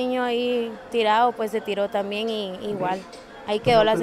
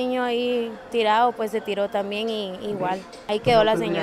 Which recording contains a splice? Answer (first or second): second